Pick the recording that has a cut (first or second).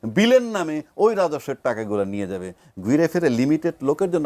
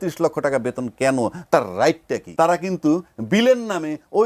second